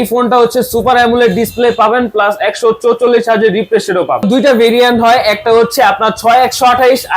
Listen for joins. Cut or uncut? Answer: cut